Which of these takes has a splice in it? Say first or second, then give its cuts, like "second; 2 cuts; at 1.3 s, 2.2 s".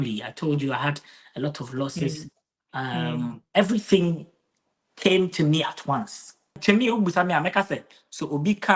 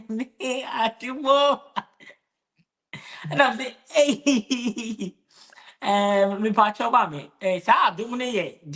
first; 1 cut; at 6.5 s